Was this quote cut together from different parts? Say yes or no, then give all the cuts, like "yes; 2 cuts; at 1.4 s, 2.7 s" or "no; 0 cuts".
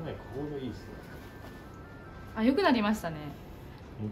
no; 0 cuts